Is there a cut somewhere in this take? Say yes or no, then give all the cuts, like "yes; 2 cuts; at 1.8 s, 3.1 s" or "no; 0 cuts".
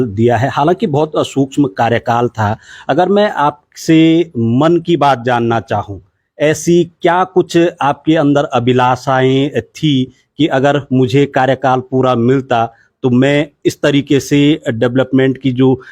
no; 0 cuts